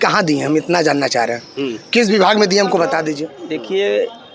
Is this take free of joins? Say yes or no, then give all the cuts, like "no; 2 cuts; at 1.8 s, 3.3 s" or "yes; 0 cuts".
no; 1 cut; at 3.3 s